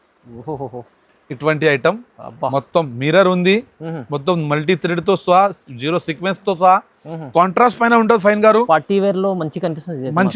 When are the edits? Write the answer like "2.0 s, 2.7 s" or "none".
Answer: none